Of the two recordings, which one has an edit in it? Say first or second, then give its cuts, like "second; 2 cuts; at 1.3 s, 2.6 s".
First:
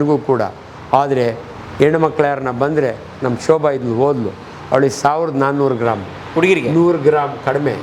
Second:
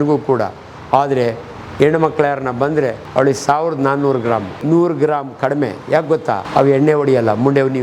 second; 3 cuts; at 3.0 s, 4.6 s, 6.4 s